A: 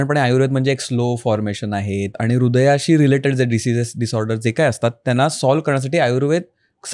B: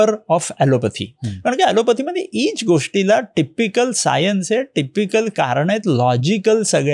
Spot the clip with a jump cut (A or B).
A